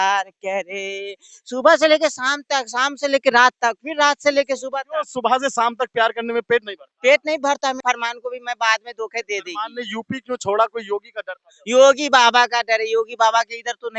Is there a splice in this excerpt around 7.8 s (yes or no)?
yes